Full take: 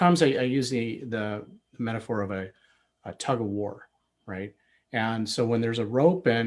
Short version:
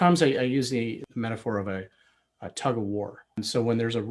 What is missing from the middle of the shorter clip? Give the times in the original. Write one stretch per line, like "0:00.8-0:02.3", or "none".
0:01.0-0:01.6
0:04.0-0:05.2